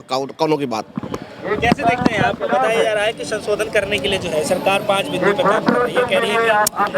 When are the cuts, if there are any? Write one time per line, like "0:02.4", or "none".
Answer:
none